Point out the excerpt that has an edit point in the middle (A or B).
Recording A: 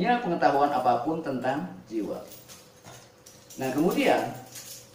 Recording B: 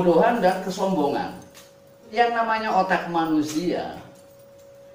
B